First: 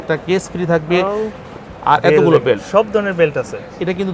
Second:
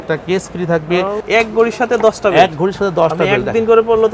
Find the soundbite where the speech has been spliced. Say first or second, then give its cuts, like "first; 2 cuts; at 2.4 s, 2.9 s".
second; 1 cut; at 1.2 s